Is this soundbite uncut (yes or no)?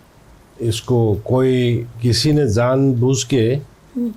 yes